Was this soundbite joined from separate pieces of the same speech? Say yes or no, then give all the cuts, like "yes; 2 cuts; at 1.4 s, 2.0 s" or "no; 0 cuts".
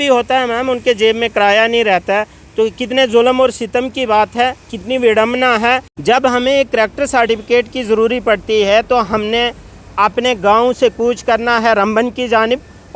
yes; 1 cut; at 5.9 s